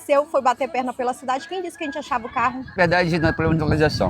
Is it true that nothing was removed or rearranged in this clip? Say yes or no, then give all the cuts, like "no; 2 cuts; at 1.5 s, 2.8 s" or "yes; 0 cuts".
no; 1 cut; at 2.7 s